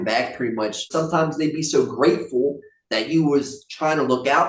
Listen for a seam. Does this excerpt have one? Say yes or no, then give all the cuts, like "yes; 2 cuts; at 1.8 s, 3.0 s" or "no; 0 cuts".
yes; 1 cut; at 0.9 s